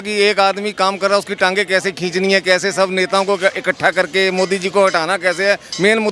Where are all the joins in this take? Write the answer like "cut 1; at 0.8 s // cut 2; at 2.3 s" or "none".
none

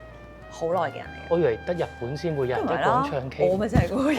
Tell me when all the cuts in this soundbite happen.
cut 1; at 1.1 s

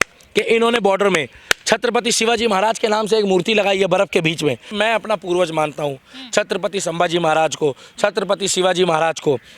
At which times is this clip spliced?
cut 1; at 4.7 s

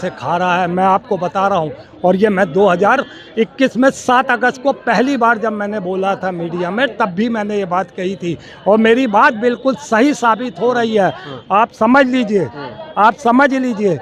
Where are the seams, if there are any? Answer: none

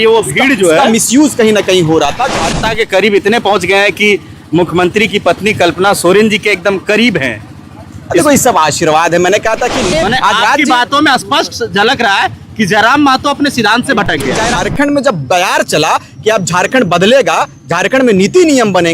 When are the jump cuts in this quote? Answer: cut 1; at 2.6 s // cut 2; at 9.9 s // cut 3; at 14.5 s

